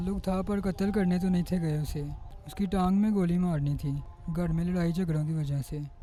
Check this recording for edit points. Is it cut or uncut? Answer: uncut